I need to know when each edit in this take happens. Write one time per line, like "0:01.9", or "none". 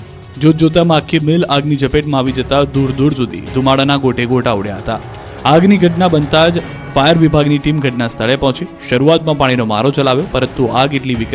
0:02.2